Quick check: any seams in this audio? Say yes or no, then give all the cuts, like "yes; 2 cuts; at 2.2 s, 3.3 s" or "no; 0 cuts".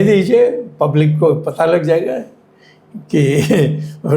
no; 0 cuts